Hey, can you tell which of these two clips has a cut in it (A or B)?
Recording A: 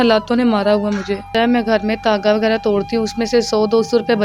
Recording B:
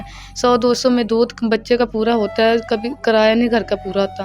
A